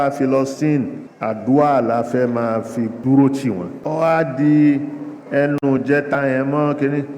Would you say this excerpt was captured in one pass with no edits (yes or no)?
no